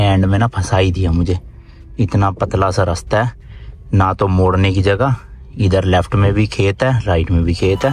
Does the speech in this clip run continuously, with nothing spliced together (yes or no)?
yes